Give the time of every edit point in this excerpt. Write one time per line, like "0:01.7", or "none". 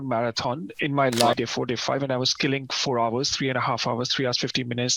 0:01.3